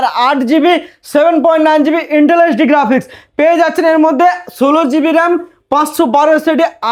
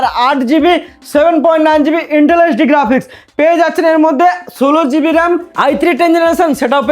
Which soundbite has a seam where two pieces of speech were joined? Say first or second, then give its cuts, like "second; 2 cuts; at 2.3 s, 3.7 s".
second; 1 cut; at 5.5 s